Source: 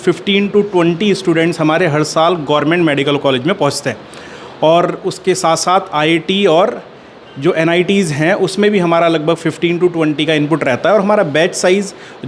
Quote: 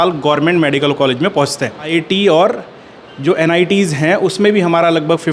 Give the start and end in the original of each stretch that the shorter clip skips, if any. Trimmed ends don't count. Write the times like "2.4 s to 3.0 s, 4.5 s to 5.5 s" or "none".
4.1 s to 6.1 s